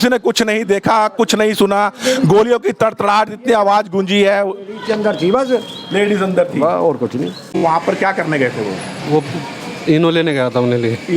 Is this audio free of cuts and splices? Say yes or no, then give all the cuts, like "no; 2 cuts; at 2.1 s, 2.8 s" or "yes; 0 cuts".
no; 1 cut; at 7.6 s